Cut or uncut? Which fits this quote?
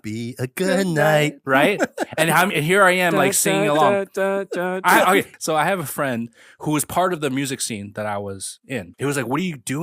cut